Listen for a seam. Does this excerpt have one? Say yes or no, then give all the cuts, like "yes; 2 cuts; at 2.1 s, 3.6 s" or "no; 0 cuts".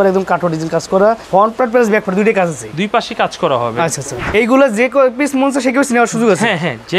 yes; 2 cuts; at 1.2 s, 4.1 s